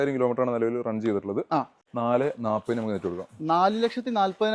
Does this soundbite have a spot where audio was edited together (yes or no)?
yes